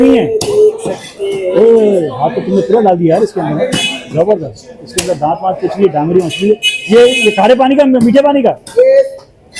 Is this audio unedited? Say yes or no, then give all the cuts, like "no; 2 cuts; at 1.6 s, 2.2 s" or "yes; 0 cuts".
yes; 0 cuts